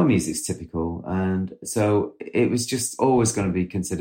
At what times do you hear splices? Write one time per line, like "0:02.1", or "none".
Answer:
0:01.6
0:02.9